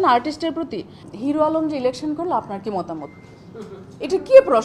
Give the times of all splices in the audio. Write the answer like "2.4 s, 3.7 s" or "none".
0.9 s